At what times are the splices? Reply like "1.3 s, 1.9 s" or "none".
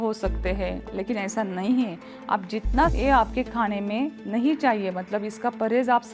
2.9 s

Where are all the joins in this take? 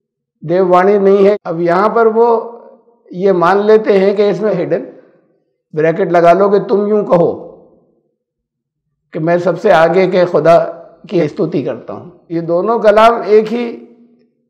1.3 s, 4.5 s, 11.2 s, 12.1 s

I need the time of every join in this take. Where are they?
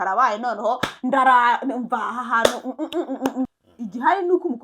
3.5 s

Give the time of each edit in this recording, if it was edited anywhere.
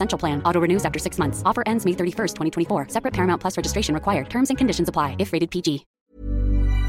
6.0 s

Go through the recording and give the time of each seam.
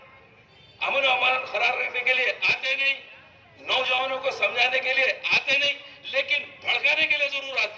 none

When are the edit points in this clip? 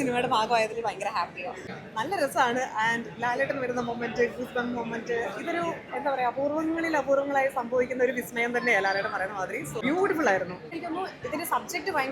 1.7 s, 9.8 s, 10.8 s

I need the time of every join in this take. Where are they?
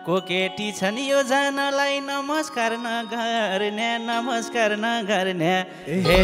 none

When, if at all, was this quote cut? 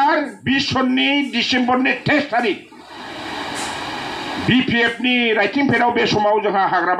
none

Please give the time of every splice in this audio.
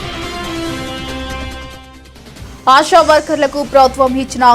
1.2 s

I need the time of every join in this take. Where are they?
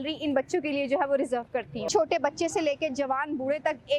1.8 s

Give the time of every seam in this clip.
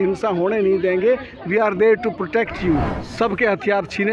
3.0 s

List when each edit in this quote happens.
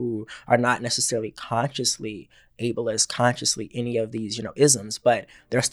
none

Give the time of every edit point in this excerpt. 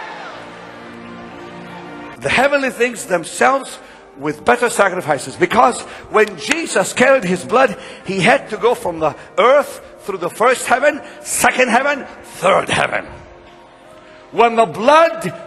2.1 s

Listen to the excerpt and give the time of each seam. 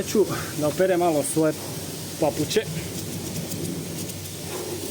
none

